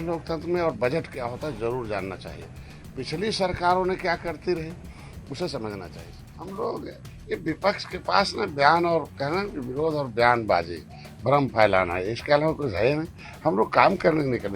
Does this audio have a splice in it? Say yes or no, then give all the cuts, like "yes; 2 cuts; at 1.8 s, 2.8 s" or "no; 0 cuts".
yes; 1 cut; at 6.0 s